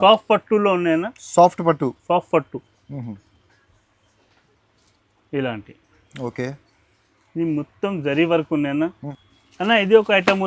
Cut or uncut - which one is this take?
cut